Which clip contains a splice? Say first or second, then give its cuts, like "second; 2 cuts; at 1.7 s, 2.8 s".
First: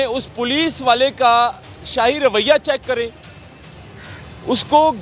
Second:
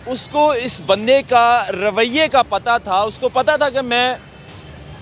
first; 1 cut; at 3.7 s